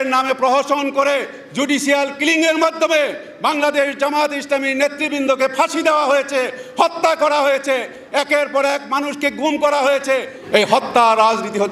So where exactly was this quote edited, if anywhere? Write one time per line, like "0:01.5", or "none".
0:10.4